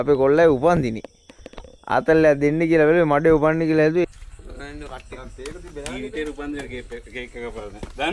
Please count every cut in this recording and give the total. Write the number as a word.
one